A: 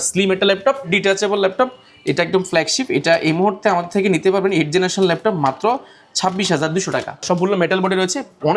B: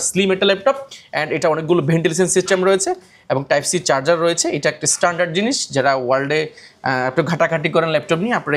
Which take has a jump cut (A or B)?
A